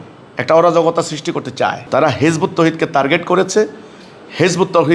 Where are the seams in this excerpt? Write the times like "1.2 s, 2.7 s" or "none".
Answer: none